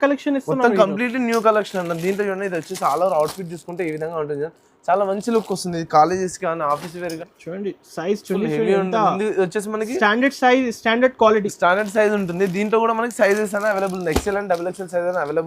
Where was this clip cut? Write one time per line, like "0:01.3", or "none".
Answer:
0:07.2